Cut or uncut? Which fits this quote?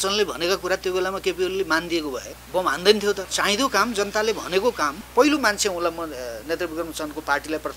cut